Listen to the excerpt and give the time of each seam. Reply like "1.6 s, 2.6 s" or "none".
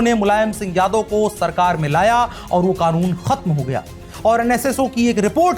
4.1 s